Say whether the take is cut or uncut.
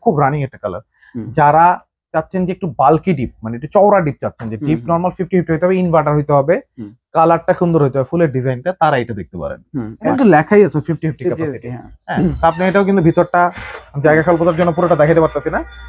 cut